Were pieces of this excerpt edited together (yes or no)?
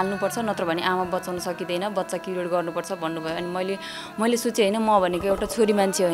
no